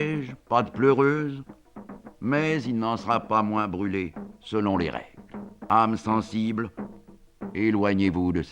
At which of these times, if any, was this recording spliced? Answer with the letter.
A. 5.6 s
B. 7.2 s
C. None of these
A